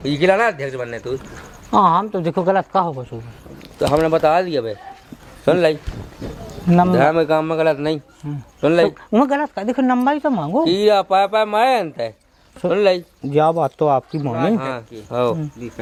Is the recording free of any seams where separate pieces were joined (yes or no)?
yes